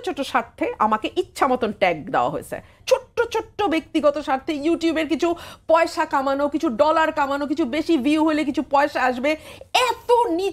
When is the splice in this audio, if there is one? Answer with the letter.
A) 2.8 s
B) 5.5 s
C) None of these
A